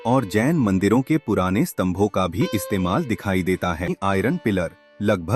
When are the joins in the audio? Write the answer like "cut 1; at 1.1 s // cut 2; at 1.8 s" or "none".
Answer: cut 1; at 4.0 s